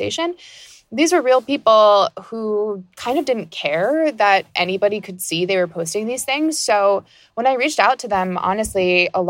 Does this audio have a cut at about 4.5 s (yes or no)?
no